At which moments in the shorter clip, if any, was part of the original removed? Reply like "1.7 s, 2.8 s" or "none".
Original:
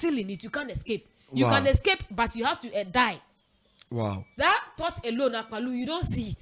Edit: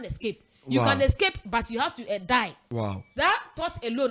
2.6 s